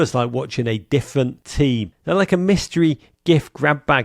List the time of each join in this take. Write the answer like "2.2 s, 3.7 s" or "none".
1.7 s